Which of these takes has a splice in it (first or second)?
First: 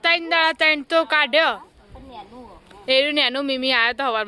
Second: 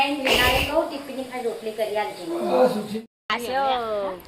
second